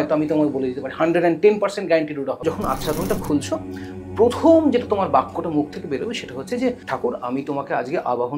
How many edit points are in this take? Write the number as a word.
two